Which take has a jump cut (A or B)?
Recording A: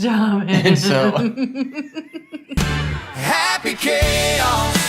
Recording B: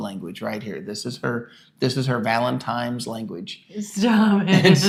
A